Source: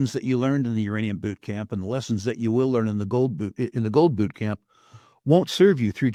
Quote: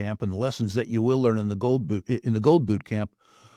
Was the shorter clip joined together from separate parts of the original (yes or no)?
no